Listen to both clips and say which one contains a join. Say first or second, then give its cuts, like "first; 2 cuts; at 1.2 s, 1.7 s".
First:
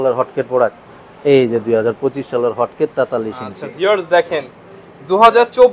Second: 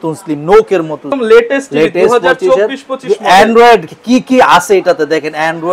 second; 1 cut; at 1.2 s